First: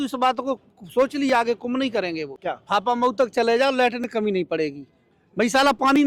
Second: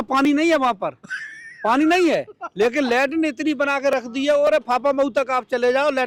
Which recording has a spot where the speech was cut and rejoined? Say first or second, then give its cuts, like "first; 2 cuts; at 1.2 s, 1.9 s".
first; 1 cut; at 2.3 s